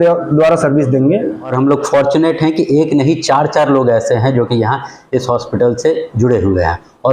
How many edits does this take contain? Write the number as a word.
one